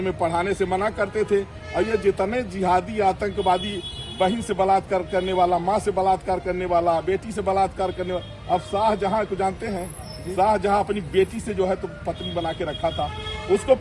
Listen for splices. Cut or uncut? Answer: uncut